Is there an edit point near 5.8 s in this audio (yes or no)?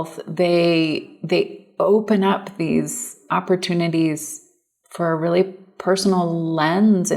no